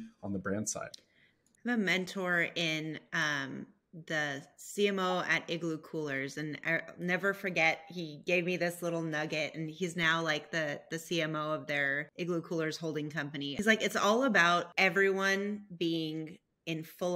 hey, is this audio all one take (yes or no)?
no